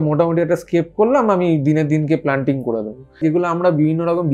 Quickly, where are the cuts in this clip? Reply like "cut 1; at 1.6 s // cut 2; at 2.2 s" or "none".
cut 1; at 3.2 s